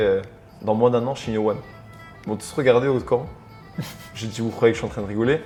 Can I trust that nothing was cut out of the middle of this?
yes; 0 cuts

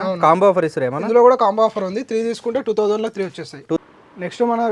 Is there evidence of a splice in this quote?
yes; 1 cut; at 3.8 s

